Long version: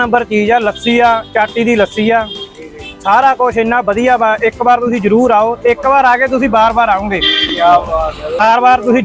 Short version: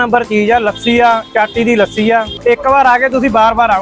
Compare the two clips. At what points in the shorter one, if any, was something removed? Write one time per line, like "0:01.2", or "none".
0:02.6